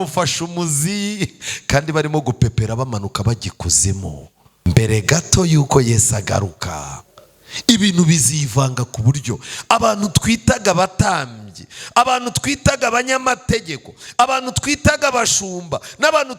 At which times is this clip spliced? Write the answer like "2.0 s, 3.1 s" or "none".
4.4 s